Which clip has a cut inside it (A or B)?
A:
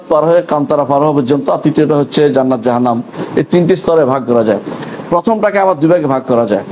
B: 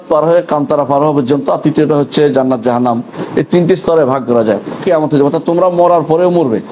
B